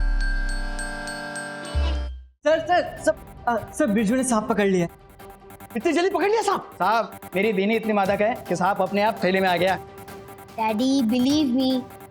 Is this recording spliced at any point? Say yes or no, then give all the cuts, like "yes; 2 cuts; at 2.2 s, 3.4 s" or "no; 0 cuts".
yes; 1 cut; at 2.2 s